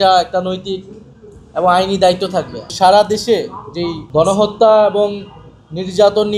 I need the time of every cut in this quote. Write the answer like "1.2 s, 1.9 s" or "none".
2.6 s, 4.0 s